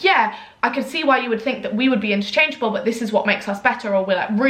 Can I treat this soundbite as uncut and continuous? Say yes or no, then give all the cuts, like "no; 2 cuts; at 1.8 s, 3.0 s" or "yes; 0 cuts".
yes; 0 cuts